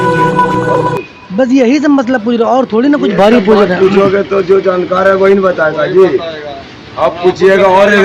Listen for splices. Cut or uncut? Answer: cut